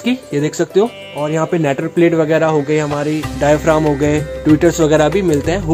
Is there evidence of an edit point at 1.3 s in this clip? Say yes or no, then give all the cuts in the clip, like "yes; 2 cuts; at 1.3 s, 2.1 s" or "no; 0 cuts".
yes; 1 cut; at 1.3 s